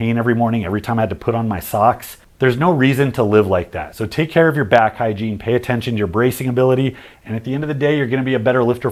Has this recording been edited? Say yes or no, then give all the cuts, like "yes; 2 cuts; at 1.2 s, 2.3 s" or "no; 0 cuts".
no; 0 cuts